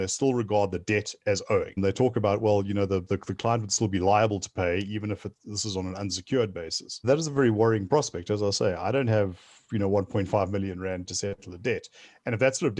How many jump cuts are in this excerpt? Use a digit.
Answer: 3